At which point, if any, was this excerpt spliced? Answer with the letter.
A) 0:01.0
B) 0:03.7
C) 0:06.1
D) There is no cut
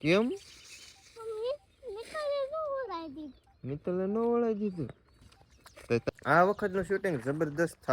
C